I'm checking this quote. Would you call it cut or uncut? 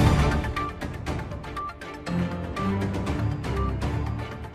uncut